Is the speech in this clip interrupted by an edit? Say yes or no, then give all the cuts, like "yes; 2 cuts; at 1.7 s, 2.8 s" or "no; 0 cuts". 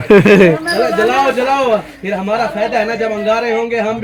no; 0 cuts